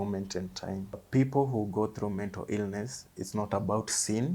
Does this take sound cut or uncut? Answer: cut